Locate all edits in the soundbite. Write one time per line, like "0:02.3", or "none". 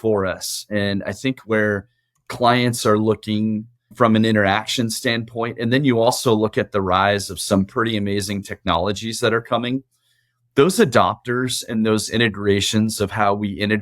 0:03.9